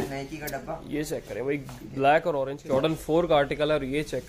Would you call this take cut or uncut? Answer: cut